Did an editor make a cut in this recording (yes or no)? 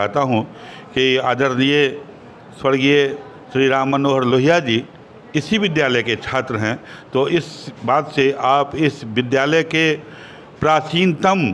no